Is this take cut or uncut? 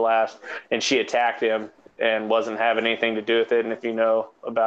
cut